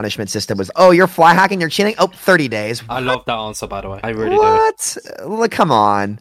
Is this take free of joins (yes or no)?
yes